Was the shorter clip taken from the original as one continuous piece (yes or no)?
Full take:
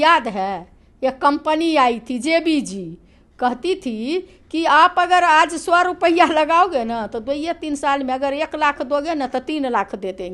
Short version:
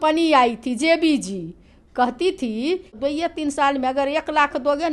no